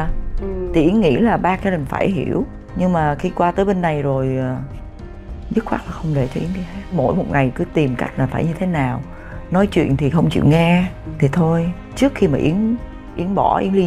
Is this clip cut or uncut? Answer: uncut